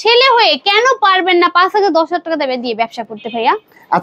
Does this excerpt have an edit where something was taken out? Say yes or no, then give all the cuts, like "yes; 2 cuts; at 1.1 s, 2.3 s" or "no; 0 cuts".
no; 0 cuts